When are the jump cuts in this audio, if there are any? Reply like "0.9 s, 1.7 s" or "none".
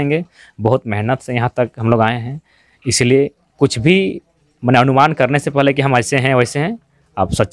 none